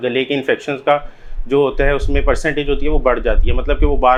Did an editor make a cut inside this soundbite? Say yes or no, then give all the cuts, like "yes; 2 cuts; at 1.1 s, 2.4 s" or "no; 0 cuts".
no; 0 cuts